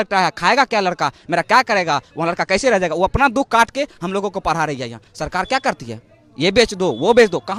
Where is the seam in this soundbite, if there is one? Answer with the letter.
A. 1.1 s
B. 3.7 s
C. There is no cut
C